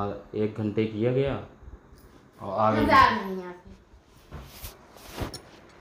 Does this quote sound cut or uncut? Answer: uncut